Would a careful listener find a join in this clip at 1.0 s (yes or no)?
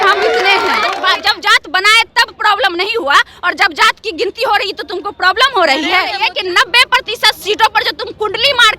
yes